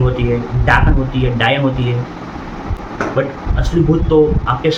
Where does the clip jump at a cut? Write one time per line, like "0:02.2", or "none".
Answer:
none